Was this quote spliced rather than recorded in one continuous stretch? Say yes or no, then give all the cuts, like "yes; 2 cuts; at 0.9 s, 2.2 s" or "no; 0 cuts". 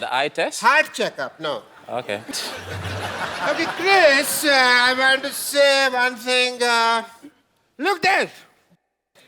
yes; 1 cut; at 2.3 s